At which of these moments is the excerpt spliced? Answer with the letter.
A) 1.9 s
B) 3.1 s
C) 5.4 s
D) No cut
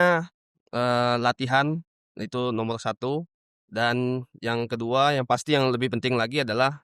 D